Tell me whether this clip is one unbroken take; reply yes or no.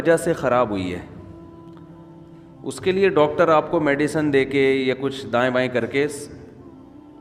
no